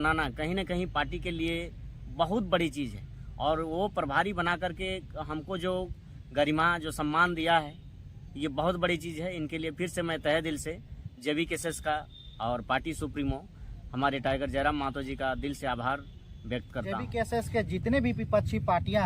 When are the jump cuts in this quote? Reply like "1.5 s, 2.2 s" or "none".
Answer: 17.0 s